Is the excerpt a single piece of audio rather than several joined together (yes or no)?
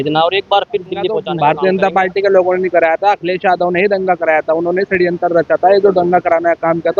no